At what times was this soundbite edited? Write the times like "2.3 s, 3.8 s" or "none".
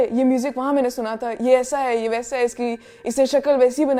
none